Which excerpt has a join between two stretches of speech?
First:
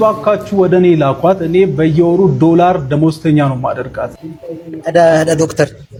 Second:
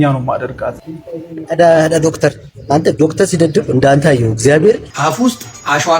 second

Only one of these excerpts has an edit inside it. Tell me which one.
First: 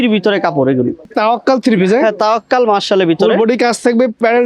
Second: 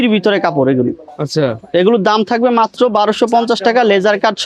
first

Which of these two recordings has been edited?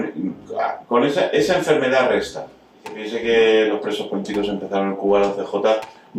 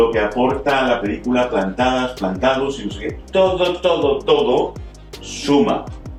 first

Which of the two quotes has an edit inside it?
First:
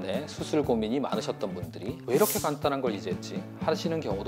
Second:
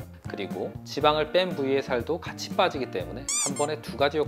first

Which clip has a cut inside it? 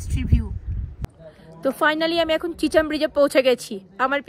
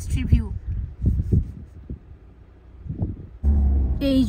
first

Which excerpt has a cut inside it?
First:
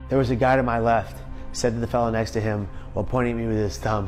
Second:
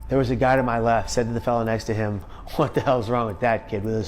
second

